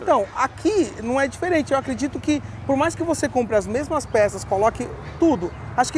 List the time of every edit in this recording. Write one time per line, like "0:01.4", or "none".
none